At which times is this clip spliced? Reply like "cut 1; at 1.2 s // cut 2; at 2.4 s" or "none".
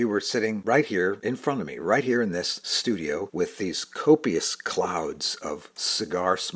none